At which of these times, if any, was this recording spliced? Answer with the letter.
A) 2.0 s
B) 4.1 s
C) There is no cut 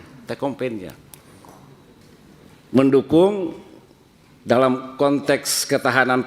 A